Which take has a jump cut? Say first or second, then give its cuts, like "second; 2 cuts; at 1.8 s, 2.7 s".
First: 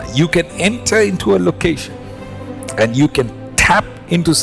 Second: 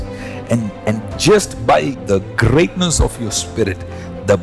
second; 1 cut; at 2.0 s